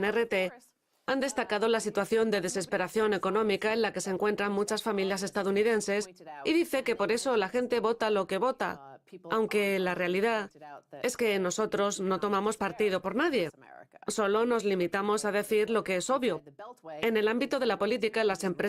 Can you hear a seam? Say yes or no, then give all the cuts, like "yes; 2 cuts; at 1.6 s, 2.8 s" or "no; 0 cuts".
yes; 1 cut; at 1.2 s